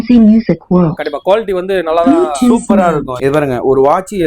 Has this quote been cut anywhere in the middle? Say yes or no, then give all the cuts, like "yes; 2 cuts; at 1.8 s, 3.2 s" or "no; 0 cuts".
yes; 1 cut; at 3.1 s